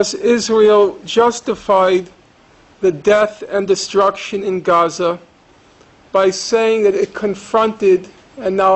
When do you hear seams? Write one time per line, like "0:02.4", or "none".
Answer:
0:01.8